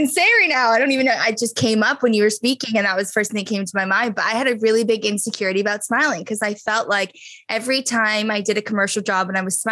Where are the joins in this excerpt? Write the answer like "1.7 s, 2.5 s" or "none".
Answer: none